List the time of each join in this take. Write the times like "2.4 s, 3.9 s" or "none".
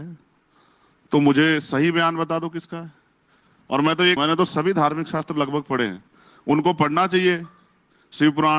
4.2 s